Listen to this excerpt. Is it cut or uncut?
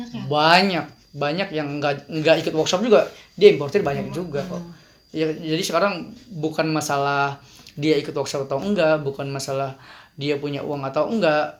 uncut